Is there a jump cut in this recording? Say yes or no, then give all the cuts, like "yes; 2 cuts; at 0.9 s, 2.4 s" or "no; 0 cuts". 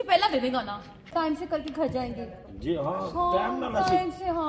yes; 1 cut; at 1.1 s